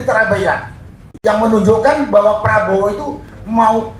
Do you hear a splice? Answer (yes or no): yes